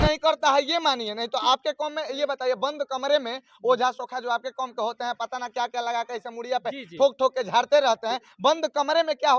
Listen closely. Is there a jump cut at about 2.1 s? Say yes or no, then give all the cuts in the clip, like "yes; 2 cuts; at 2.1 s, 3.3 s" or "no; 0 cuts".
no; 0 cuts